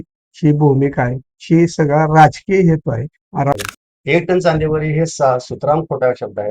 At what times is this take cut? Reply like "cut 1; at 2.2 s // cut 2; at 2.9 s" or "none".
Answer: cut 1; at 3.5 s